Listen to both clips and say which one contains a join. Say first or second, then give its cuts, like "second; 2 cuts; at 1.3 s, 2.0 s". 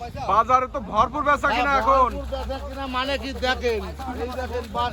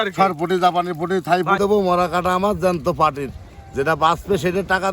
second; 1 cut; at 1.6 s